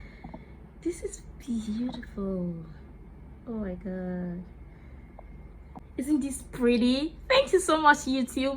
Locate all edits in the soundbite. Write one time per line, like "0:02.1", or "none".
0:05.8